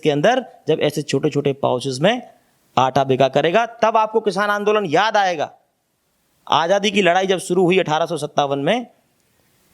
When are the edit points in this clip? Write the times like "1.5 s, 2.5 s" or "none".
none